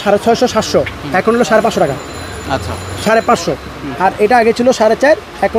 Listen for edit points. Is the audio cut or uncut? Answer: uncut